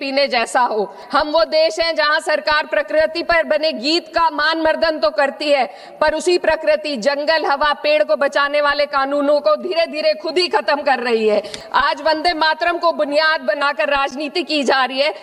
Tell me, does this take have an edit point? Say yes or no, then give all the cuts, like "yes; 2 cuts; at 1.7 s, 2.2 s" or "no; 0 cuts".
yes; 2 cuts; at 1.0 s, 11.6 s